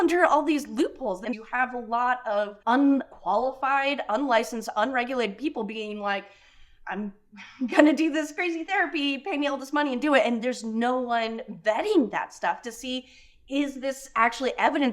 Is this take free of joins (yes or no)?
no